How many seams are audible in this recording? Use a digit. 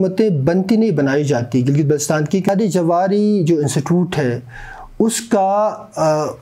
1